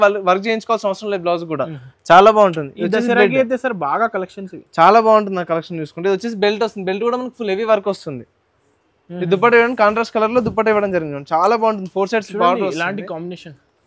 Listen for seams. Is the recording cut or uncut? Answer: uncut